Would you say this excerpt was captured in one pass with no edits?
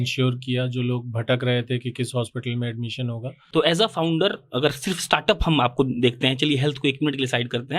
no; 1 cut; at 3.3 s

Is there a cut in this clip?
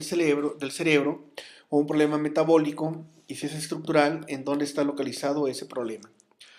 yes; 1 cut; at 3.4 s

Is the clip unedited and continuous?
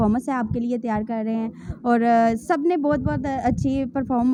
yes; 0 cuts

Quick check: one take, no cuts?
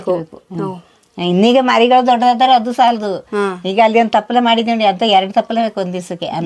yes; 0 cuts

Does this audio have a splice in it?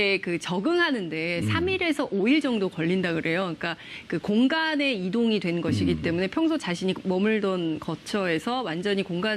yes; 1 cut; at 2.4 s

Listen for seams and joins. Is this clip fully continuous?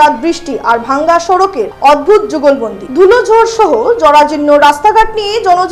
yes; 0 cuts

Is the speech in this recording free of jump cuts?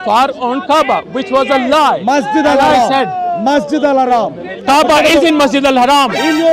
yes; 0 cuts

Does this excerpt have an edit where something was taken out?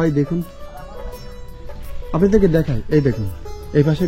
no; 0 cuts

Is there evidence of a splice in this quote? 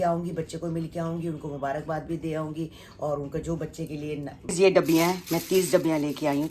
yes; 1 cut; at 4.3 s

